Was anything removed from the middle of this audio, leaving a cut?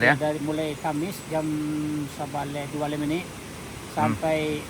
no; 0 cuts

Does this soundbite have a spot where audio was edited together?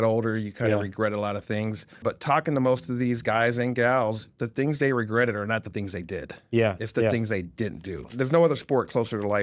yes; 2 cuts; at 2.0 s, 8.1 s

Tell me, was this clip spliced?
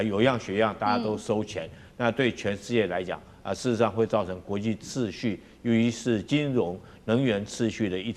no; 0 cuts

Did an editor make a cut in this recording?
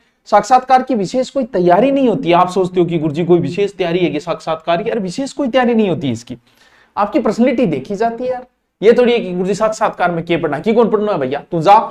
no; 0 cuts

